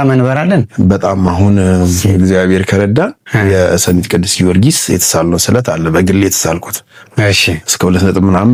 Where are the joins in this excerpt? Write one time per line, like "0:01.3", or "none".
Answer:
none